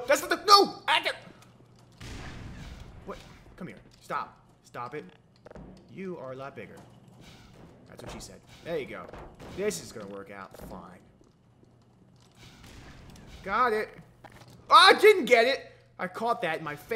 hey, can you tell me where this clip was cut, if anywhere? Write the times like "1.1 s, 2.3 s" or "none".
1.6 s